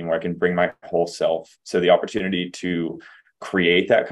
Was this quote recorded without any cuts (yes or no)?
no